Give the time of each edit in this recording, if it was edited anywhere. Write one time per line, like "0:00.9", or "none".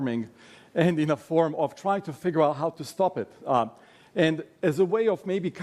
0:02.7